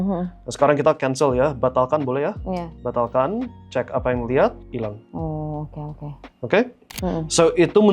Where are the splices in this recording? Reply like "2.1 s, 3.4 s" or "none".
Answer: 7.0 s